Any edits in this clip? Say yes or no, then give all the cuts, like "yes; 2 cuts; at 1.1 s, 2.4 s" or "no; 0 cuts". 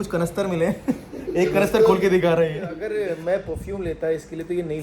yes; 1 cut; at 2.7 s